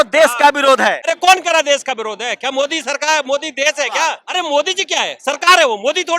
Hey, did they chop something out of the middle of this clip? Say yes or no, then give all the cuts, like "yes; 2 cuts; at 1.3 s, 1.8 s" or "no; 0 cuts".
yes; 2 cuts; at 1.0 s, 4.2 s